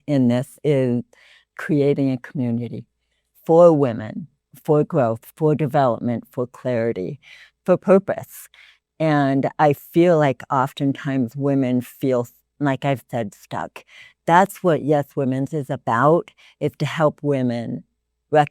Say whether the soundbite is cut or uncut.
cut